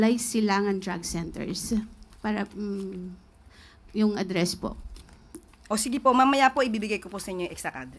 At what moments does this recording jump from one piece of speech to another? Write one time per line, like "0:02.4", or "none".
none

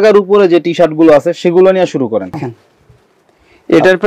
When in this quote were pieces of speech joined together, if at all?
0:02.5

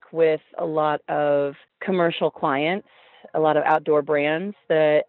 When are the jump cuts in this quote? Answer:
0:01.7

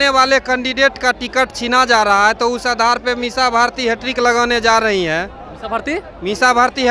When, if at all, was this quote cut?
none

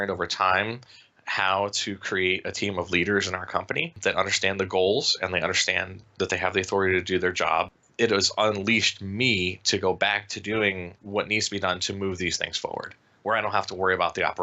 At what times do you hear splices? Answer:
0:04.0
0:07.8
0:10.9

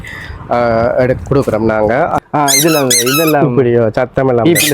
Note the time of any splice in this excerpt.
0:02.2

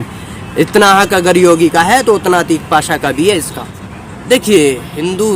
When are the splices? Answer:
0:03.8

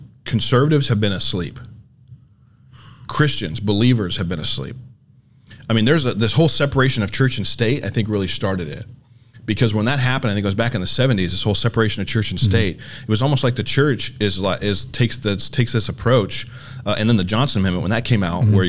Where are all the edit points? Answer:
none

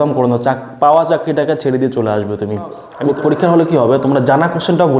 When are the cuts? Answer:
0:02.9

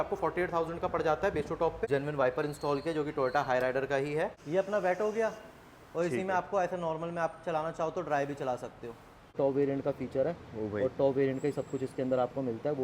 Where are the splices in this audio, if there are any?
0:01.8
0:04.4
0:09.3

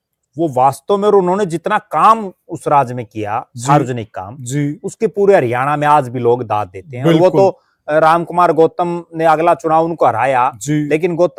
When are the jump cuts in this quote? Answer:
none

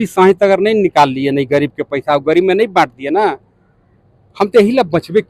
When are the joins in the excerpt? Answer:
none

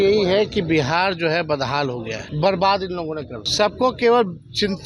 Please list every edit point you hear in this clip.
0:02.2
0:03.4

